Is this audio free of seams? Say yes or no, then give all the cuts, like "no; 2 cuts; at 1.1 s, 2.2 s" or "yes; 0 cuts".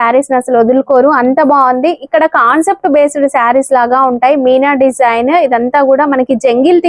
yes; 0 cuts